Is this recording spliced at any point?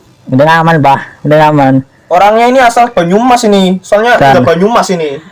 no; 0 cuts

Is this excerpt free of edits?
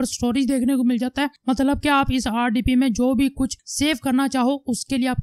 yes; 0 cuts

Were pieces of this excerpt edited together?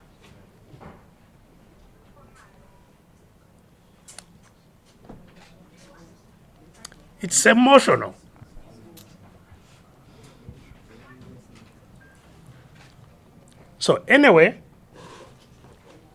yes; 1 cut; at 13.1 s

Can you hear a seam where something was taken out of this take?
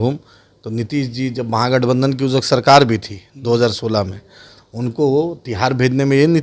no; 0 cuts

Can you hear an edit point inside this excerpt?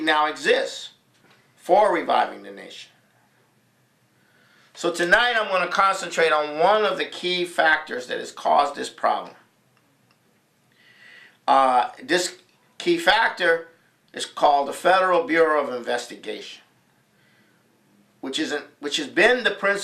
no; 0 cuts

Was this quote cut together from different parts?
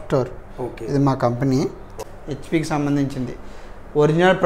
no; 0 cuts

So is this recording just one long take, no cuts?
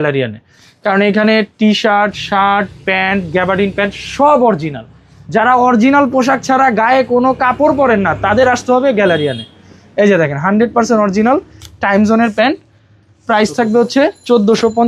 yes; 0 cuts

